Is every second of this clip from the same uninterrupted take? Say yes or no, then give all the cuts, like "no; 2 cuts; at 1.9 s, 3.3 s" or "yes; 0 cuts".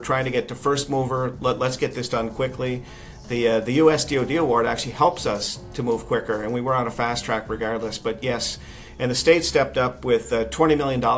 yes; 0 cuts